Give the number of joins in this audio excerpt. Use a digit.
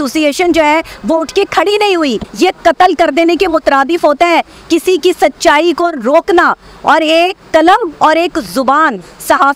1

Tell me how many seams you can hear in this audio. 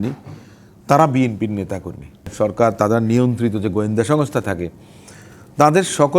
1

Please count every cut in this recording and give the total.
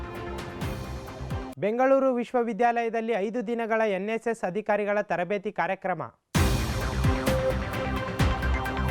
1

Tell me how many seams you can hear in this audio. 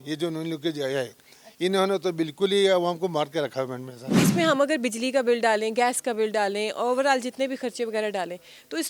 1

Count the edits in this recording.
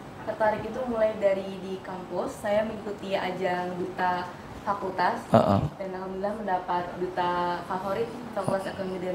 0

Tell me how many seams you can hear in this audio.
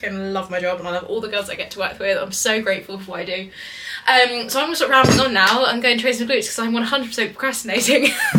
0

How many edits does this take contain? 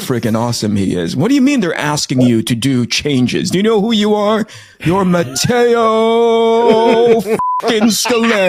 0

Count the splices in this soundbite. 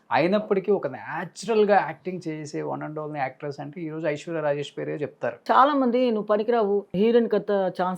2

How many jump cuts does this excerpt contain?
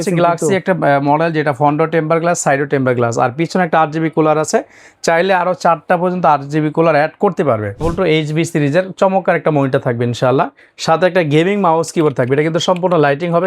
1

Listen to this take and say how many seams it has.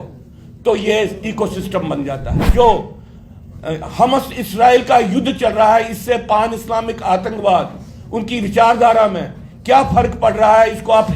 1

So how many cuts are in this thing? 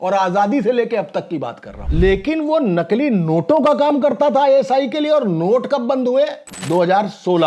2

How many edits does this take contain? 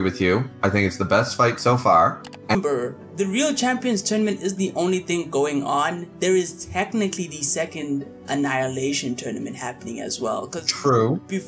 1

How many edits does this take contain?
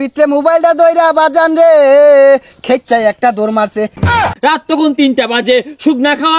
1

